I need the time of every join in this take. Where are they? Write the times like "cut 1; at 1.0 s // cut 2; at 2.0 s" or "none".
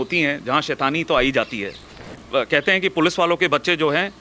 cut 1; at 2.2 s